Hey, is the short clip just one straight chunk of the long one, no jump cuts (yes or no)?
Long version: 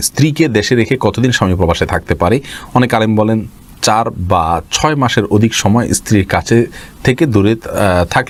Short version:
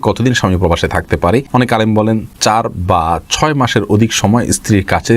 no